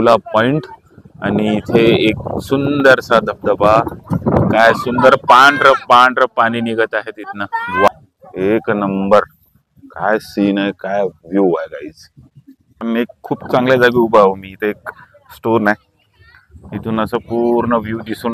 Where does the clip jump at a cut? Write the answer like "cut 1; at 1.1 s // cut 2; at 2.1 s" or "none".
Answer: cut 1; at 7.9 s // cut 2; at 12.7 s